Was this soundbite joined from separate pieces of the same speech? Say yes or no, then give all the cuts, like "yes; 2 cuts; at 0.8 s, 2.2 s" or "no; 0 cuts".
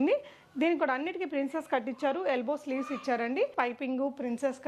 yes; 1 cut; at 3.5 s